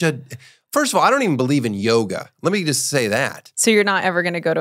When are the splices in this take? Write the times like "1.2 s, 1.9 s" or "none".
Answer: 3.4 s